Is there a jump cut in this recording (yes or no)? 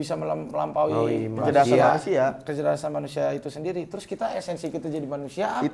no